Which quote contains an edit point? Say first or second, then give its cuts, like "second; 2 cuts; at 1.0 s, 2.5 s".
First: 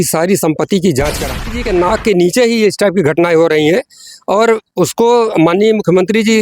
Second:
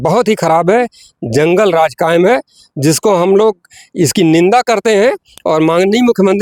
first; 1 cut; at 1.4 s